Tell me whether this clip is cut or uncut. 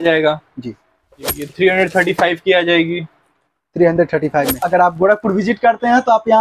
cut